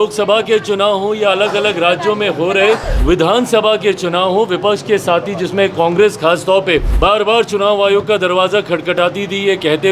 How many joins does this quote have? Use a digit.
2